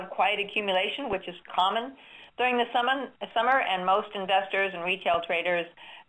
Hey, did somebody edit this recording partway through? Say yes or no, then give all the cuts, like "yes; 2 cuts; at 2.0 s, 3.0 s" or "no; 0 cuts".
yes; 1 cut; at 4.1 s